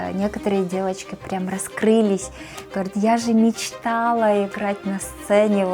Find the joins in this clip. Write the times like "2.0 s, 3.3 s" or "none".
none